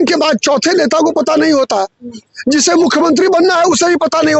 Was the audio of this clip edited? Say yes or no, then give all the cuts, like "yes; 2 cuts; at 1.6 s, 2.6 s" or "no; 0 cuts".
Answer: no; 0 cuts